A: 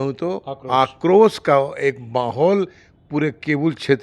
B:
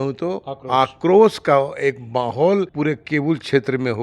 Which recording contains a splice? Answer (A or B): B